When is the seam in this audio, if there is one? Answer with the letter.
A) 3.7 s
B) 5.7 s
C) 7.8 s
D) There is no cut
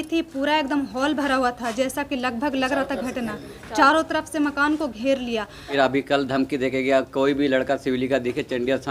B